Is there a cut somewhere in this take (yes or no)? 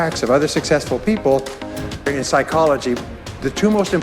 yes